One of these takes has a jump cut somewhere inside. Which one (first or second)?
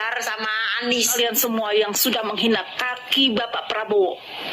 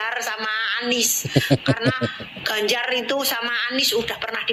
first